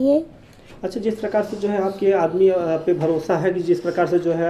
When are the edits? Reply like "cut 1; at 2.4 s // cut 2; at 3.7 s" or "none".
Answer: none